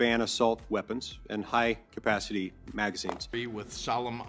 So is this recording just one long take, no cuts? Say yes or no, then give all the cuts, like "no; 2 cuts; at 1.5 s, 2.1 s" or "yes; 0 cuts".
no; 1 cut; at 3.2 s